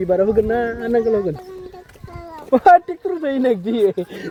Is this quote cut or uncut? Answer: uncut